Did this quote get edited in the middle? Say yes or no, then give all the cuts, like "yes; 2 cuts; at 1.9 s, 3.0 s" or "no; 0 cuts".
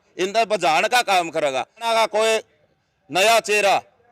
yes; 1 cut; at 1.8 s